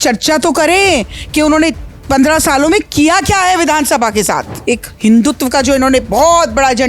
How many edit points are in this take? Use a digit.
1